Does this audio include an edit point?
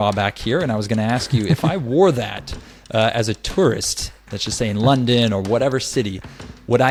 no; 0 cuts

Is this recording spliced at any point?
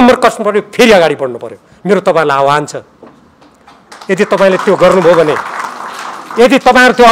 no; 0 cuts

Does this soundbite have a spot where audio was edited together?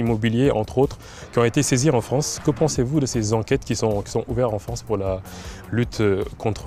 no; 0 cuts

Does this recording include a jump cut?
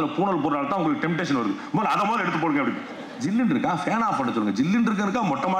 yes; 1 cut; at 3.1 s

